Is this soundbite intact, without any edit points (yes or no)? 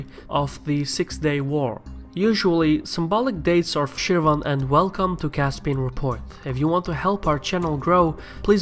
yes